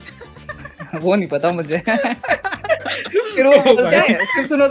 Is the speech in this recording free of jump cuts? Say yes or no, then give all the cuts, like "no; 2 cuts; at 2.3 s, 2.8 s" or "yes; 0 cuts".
yes; 0 cuts